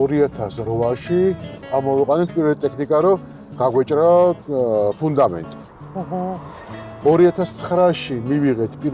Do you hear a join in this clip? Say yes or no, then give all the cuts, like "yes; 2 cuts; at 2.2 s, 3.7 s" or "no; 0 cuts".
yes; 1 cut; at 1.5 s